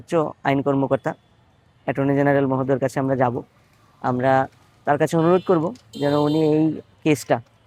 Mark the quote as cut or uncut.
uncut